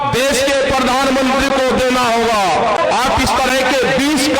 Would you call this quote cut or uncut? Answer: cut